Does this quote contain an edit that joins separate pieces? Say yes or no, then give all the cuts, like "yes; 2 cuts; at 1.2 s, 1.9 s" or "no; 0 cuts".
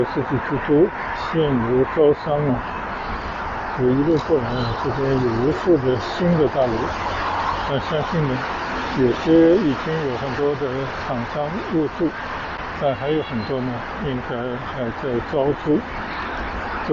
no; 0 cuts